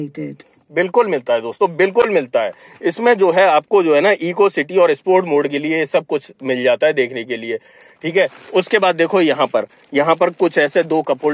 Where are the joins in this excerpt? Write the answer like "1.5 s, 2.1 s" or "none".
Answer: none